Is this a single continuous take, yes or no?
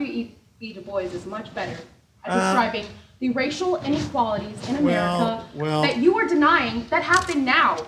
yes